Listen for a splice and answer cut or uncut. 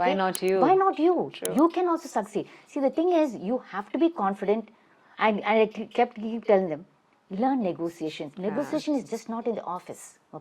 uncut